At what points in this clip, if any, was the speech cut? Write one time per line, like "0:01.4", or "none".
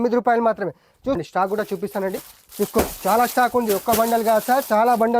0:01.2